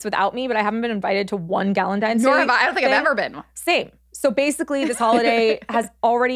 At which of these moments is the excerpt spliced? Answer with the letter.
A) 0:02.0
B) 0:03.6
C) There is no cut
C